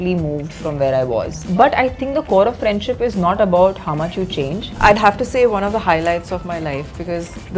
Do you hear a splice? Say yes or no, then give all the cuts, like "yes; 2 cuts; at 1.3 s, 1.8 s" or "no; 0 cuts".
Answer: yes; 2 cuts; at 1.5 s, 4.6 s